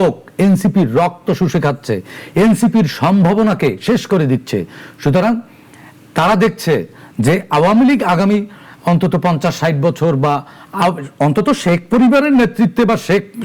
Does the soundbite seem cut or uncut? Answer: uncut